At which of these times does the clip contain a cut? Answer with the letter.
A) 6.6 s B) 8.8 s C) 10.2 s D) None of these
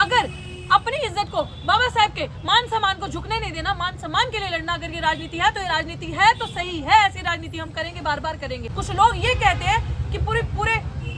B